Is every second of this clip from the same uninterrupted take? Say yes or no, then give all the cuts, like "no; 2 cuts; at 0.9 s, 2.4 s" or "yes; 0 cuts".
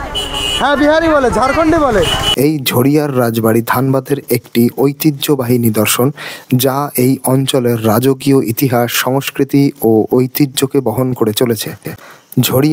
no; 1 cut; at 2.2 s